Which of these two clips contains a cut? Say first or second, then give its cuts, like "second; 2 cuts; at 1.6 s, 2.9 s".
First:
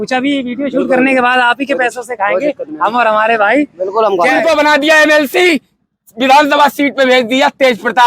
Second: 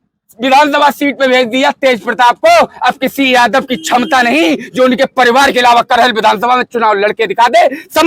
first; 1 cut; at 4.4 s